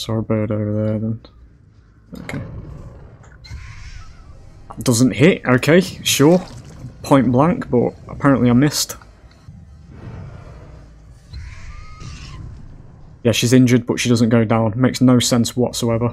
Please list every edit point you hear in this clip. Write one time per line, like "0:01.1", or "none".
0:09.5